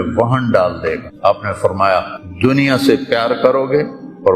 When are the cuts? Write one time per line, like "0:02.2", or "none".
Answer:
0:01.1
0:02.2

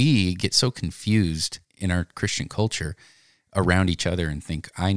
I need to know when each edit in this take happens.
0:02.1

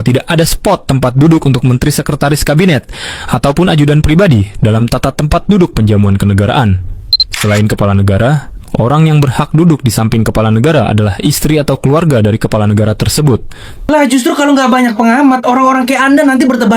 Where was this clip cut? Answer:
0:13.8

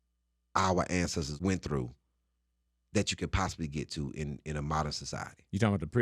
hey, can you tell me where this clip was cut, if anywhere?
0:01.3

